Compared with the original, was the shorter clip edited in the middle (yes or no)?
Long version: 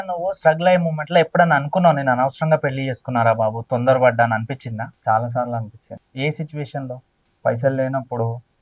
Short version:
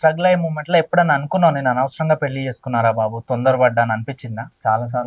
no